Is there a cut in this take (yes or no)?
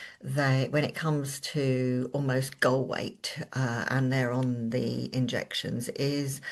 no